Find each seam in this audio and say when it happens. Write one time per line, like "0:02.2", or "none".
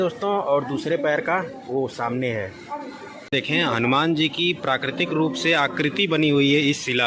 0:03.3